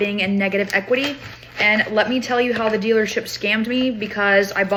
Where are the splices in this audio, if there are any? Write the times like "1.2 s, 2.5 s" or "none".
none